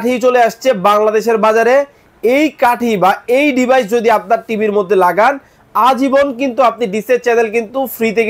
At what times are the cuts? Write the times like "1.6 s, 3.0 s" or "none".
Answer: none

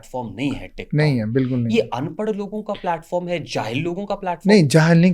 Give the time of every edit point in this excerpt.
none

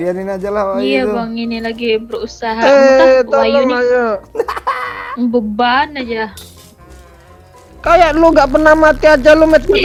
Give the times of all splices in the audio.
none

